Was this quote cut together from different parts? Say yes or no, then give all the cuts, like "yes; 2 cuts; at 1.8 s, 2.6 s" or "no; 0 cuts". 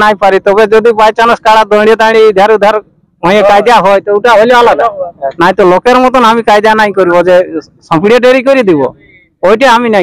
no; 0 cuts